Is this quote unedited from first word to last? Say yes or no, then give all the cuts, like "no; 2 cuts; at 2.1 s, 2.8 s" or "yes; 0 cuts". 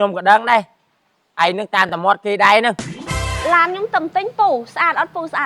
no; 1 cut; at 3.3 s